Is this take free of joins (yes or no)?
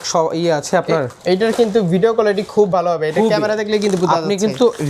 no